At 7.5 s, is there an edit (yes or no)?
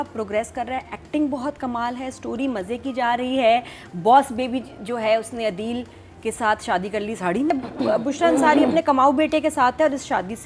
yes